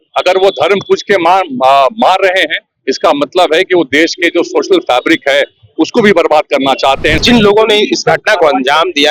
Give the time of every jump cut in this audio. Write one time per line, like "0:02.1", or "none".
0:07.2